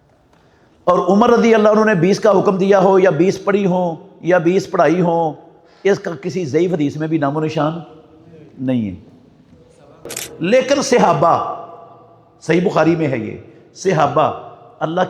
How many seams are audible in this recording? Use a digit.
1